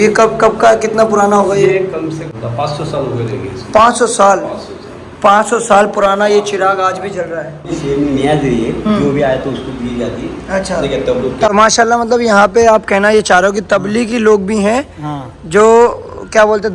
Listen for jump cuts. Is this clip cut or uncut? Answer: cut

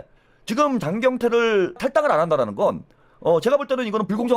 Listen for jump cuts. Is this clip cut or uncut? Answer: cut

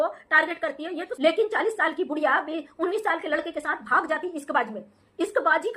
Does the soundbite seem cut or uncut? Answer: cut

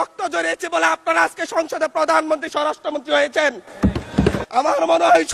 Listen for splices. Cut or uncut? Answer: cut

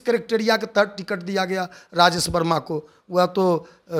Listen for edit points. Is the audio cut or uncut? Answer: uncut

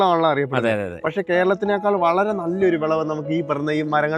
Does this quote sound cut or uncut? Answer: uncut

